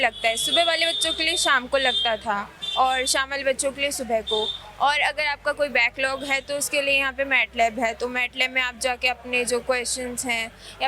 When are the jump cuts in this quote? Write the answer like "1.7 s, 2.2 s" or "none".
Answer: none